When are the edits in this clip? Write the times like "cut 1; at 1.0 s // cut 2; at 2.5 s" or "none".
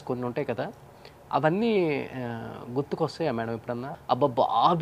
cut 1; at 3.9 s